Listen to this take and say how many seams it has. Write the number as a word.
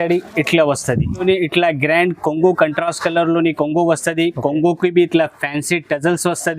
one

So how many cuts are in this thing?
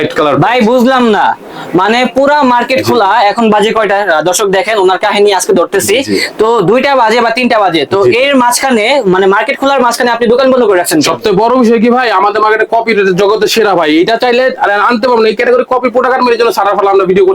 zero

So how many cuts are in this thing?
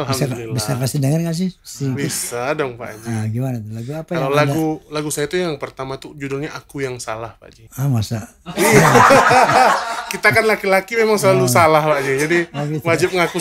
zero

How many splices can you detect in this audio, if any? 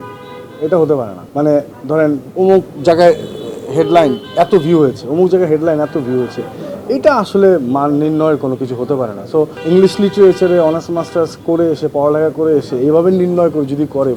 three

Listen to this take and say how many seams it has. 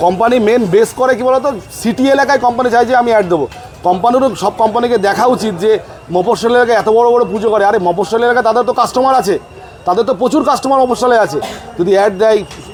zero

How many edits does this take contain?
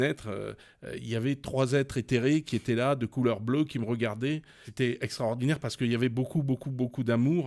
one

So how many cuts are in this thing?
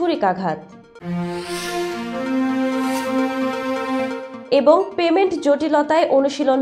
zero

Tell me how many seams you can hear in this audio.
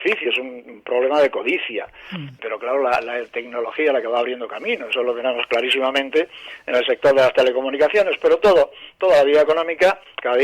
one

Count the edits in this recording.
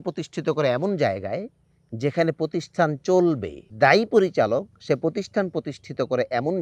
one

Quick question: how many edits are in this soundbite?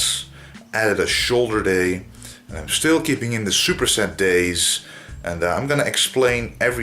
one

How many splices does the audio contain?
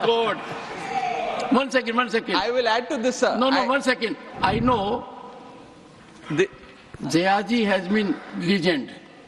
one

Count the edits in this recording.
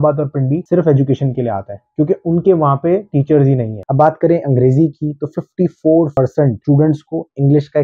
one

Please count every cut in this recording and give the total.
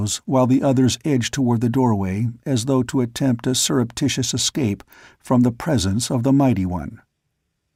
zero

